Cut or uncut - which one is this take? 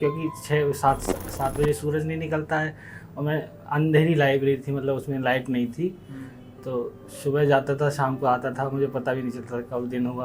uncut